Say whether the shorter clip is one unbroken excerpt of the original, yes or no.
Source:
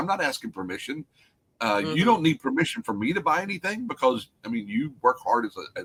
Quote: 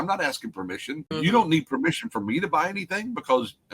no